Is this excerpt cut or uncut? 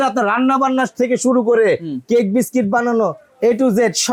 uncut